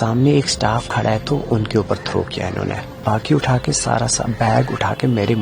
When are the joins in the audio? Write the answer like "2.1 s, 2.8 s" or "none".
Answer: 2.9 s